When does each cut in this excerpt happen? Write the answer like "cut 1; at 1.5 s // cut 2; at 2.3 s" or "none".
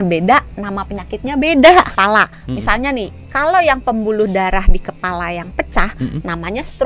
cut 1; at 2.0 s